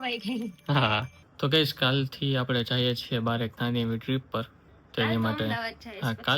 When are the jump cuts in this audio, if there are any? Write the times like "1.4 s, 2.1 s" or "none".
1.2 s